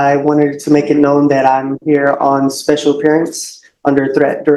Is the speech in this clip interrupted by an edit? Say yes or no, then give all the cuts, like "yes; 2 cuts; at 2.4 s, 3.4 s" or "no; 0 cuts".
no; 0 cuts